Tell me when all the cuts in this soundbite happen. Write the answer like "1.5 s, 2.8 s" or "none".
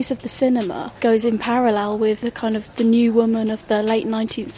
2.2 s